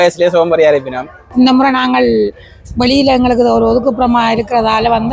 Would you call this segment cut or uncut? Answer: cut